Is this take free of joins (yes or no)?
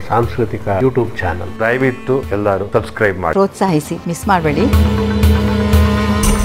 no